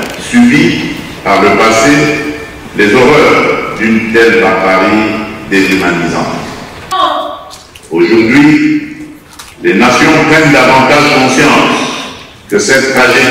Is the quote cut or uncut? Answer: cut